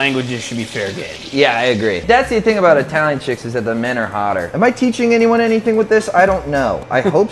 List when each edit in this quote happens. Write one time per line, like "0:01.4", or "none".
0:02.0
0:04.5